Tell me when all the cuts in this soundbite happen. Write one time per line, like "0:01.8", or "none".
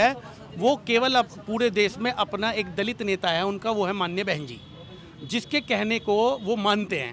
none